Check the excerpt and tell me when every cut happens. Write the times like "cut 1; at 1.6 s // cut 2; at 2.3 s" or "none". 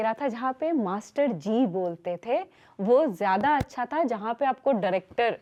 none